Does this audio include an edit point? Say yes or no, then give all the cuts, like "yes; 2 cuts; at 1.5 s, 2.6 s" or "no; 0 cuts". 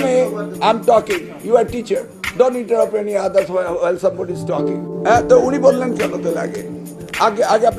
yes; 1 cut; at 4.5 s